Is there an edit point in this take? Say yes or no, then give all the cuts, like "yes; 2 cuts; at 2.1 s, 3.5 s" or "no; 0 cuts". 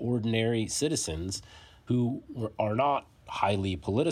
no; 0 cuts